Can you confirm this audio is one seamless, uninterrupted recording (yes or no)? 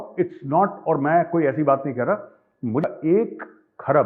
no